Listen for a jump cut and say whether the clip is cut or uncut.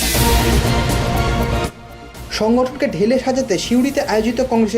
cut